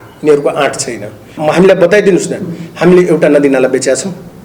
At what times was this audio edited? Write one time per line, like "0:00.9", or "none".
0:01.3